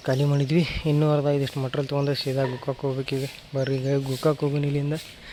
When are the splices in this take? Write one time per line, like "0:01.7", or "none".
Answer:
none